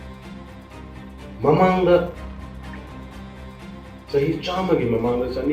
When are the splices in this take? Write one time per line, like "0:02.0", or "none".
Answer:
0:02.7
0:04.1